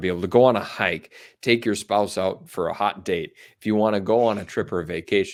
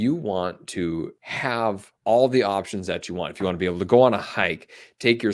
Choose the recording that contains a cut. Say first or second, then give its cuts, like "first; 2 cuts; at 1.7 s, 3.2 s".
second; 1 cut; at 1.5 s